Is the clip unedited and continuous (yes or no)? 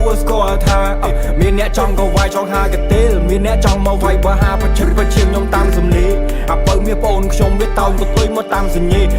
yes